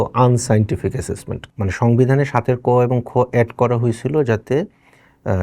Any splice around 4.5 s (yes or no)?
no